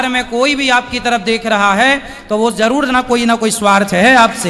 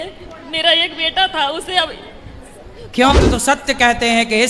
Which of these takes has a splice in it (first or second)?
second